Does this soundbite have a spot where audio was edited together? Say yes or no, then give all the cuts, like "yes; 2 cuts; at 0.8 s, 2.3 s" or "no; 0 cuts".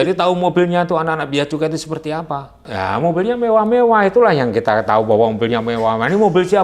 yes; 1 cut; at 2.7 s